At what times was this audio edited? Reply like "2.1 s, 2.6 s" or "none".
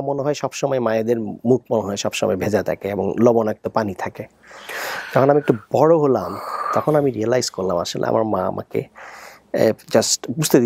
none